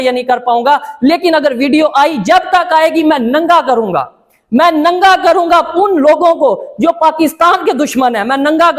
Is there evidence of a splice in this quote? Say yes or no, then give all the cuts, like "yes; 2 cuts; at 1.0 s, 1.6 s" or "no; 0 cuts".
no; 0 cuts